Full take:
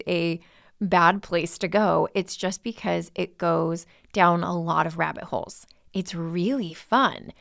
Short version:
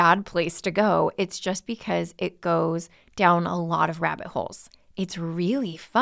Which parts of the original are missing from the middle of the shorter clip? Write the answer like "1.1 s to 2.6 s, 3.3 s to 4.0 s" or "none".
none